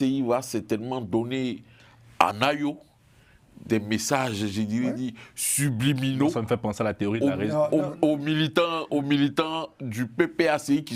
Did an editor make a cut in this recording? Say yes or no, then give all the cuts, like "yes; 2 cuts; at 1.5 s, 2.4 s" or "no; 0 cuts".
no; 0 cuts